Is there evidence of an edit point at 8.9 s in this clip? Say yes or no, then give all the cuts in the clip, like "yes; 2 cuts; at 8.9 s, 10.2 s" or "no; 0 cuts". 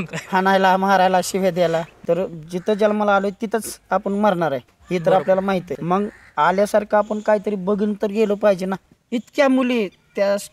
yes; 3 cuts; at 1.9 s, 5.7 s, 8.9 s